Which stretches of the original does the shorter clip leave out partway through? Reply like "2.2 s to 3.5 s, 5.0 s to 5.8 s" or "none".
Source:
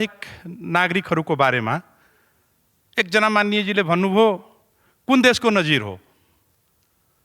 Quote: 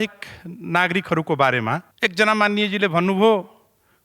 1.9 s to 2.8 s